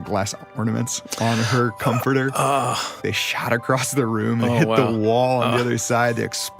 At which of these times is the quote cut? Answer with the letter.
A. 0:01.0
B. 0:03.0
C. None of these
B